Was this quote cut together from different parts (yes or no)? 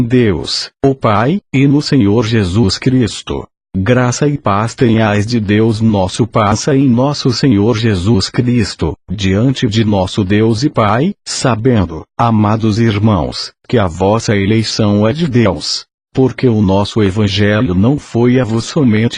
no